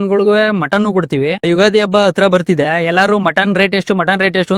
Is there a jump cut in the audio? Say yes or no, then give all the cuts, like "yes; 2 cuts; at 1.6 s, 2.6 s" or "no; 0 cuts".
yes; 1 cut; at 1.4 s